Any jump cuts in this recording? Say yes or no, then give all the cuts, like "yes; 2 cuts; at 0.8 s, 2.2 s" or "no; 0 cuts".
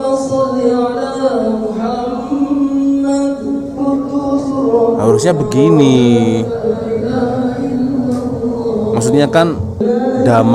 no; 0 cuts